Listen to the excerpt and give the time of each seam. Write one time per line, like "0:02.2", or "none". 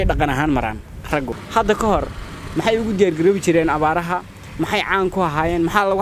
0:01.2